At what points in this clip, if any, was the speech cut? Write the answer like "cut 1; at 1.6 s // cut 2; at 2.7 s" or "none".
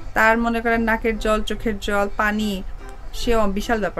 none

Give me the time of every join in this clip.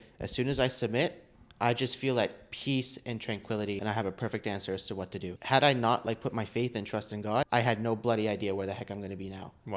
cut 1; at 3.8 s // cut 2; at 5.3 s // cut 3; at 7.5 s

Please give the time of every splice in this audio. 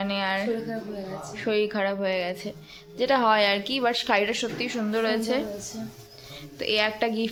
none

